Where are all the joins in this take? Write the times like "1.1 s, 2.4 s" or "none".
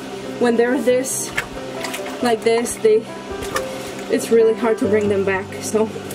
none